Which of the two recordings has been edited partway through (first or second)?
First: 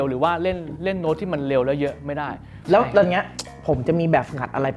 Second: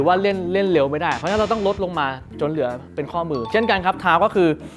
first